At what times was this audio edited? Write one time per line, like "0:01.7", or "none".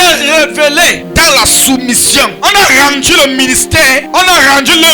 0:01.0
0:02.4
0:04.0